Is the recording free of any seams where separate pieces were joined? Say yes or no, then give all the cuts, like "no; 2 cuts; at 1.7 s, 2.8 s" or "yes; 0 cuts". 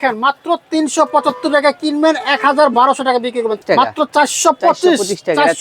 no; 1 cut; at 3.6 s